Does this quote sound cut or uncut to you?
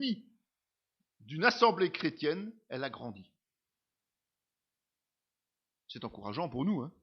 cut